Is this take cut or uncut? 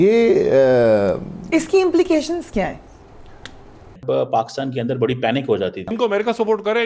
cut